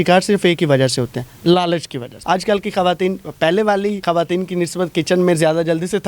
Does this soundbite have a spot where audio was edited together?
yes; 2 cuts; at 2.1 s, 4.0 s

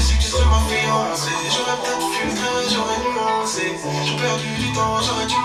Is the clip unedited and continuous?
yes; 0 cuts

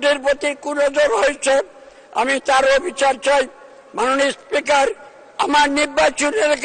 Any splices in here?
no; 0 cuts

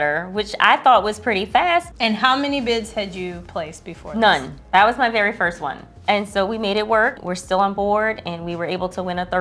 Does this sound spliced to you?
yes; 3 cuts; at 1.9 s, 5.8 s, 7.2 s

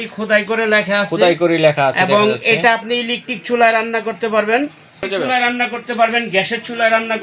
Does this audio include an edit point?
yes; 1 cut; at 5.1 s

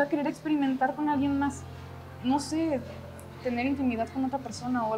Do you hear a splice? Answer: no; 0 cuts

